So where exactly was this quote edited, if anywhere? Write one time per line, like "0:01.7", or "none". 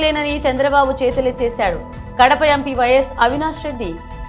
none